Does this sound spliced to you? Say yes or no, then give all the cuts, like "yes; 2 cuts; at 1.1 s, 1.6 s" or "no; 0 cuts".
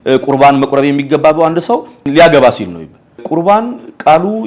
yes; 2 cuts; at 2.1 s, 3.2 s